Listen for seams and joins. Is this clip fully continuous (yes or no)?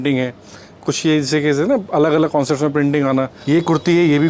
no